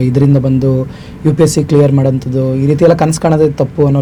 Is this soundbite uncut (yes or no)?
yes